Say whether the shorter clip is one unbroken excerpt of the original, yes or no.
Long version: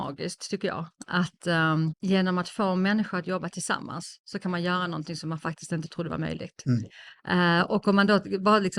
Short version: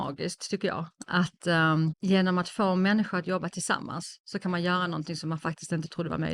yes